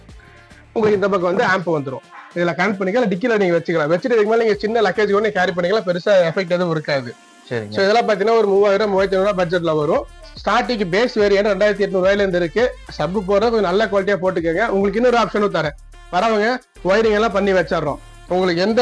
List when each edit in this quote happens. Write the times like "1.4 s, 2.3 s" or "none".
none